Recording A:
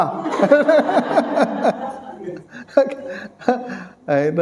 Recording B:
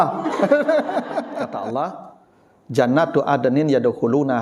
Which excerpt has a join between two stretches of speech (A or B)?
B